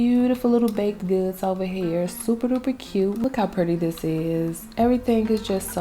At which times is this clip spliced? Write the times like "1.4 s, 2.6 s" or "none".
3.2 s